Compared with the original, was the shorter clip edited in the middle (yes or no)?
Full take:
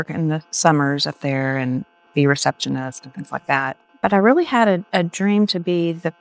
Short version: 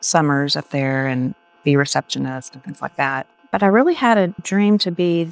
yes